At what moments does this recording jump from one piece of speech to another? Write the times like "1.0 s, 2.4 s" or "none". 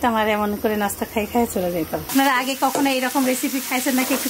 2.1 s